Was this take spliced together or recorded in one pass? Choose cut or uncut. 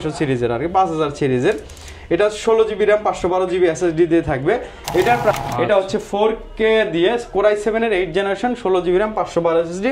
cut